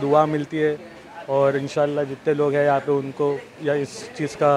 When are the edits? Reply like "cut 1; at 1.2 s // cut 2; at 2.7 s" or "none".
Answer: none